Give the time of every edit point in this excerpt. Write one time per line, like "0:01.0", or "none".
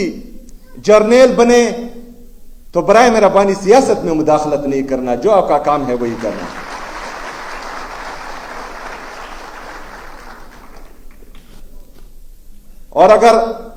none